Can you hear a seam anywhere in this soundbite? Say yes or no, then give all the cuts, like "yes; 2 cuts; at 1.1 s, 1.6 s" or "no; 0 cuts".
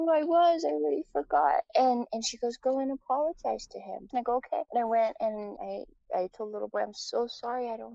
yes; 3 cuts; at 1.7 s, 4.1 s, 5.5 s